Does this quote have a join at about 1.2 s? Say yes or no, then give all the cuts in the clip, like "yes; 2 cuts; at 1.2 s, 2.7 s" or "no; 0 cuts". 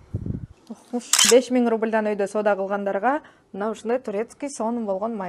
yes; 1 cut; at 1.2 s